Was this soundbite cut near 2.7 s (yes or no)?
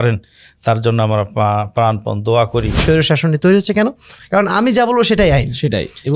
yes